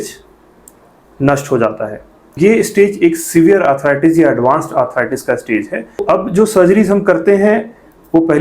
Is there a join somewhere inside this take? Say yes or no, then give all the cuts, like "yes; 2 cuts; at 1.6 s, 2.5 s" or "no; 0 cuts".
yes; 2 cuts; at 2.4 s, 6.0 s